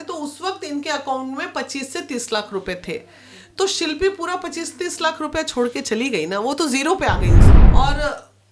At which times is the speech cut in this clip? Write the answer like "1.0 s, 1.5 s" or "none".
7.6 s